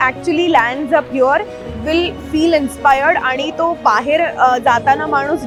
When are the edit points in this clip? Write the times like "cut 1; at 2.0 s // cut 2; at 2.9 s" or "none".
none